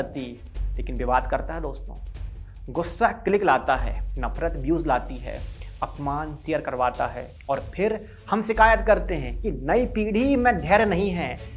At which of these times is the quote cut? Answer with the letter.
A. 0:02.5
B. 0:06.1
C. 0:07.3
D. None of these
C